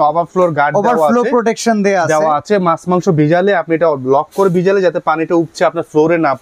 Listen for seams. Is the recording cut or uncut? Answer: uncut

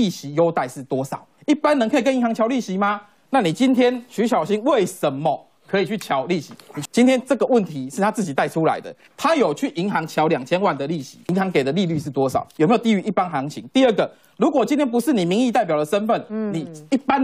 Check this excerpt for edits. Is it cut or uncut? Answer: cut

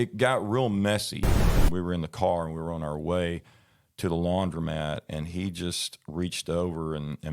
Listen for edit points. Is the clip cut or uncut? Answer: cut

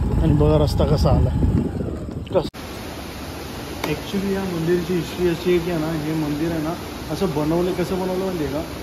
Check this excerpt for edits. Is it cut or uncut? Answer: cut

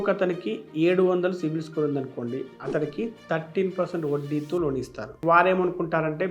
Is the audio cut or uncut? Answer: cut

